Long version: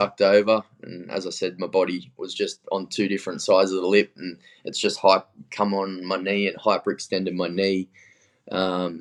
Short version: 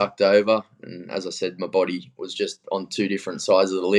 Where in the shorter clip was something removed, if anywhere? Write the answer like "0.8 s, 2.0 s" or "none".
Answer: none